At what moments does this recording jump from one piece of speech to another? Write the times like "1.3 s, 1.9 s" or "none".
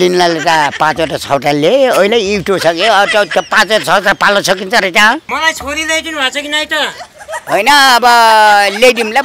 5.3 s